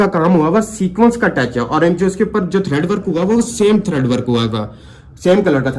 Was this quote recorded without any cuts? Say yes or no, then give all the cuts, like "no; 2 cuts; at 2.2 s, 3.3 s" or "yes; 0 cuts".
yes; 0 cuts